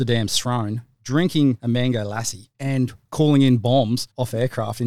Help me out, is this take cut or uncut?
cut